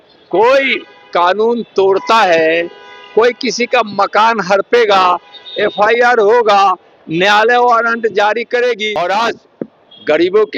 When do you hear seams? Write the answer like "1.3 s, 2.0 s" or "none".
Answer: 8.9 s

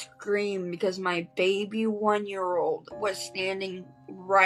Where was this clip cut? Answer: none

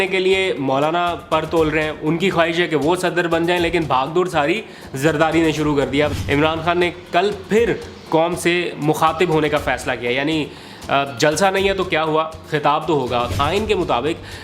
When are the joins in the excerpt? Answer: 6.1 s, 13.3 s

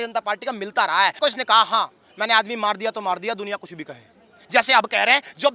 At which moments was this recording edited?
1.2 s

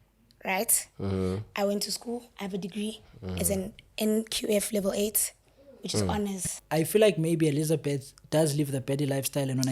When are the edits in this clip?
6.5 s

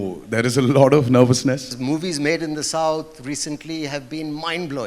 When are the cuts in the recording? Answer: 1.7 s

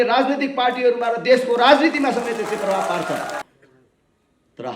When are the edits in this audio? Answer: 3.4 s

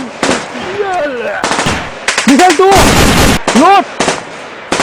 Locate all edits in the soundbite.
1.8 s

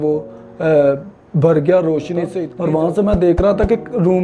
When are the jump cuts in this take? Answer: 2.5 s

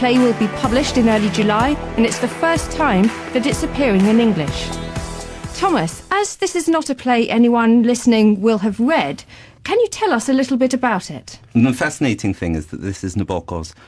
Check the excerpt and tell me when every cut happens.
8.0 s

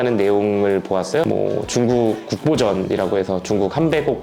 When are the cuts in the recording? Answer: 1.2 s

